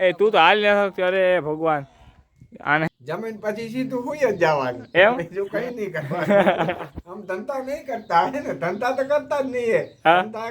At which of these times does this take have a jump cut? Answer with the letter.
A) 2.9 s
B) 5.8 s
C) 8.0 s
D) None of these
A